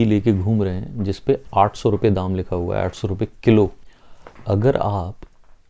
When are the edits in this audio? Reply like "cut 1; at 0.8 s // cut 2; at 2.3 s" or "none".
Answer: cut 1; at 3.8 s